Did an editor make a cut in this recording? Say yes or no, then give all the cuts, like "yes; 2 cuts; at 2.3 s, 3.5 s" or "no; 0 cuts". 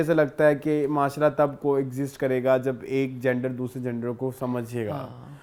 no; 0 cuts